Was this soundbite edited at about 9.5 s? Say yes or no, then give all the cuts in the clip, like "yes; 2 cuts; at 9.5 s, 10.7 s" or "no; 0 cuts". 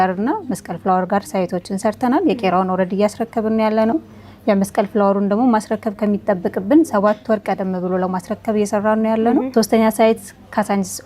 yes; 1 cut; at 9.5 s